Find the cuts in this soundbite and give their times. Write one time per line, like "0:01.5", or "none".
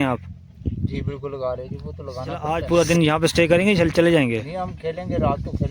0:02.4